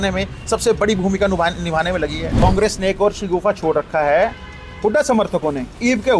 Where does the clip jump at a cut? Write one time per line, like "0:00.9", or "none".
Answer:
0:02.3